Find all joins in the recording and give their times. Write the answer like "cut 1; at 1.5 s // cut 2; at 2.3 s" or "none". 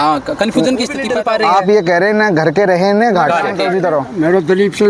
cut 1; at 1.1 s // cut 2; at 3.6 s